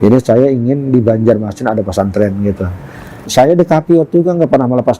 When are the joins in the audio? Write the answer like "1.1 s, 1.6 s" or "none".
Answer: 3.2 s